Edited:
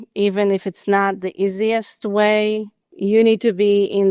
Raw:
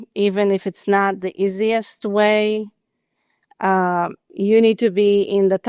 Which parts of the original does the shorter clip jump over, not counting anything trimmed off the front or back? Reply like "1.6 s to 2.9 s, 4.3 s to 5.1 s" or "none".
2.8 s to 4.2 s